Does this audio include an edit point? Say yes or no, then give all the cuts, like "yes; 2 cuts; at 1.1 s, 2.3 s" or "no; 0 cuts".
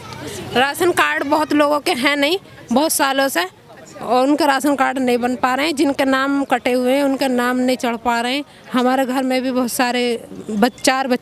no; 0 cuts